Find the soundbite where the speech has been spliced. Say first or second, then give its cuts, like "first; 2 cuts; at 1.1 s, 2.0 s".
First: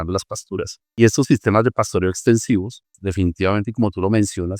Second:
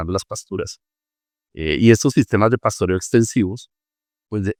first; 2 cuts; at 1.0 s, 3.0 s